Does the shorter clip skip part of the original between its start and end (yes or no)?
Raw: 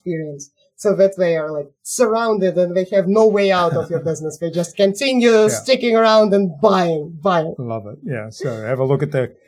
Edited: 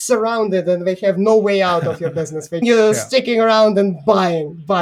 yes